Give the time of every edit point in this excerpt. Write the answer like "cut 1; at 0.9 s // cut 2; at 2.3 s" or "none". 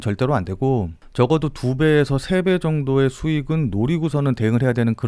cut 1; at 1.0 s